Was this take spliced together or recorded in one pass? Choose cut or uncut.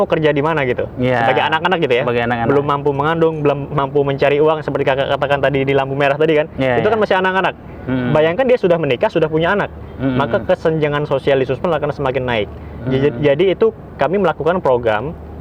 uncut